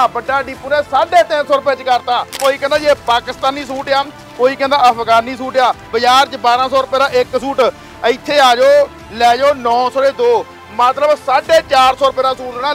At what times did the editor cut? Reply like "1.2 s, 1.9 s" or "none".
2.4 s, 5.9 s